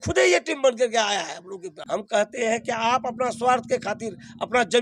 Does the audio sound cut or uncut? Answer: cut